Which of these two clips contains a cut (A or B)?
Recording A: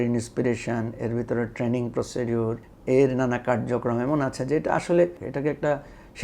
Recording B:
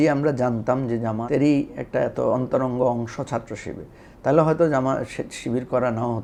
A